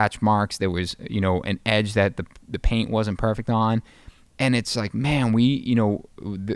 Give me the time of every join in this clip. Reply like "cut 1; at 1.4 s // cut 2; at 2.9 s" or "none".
none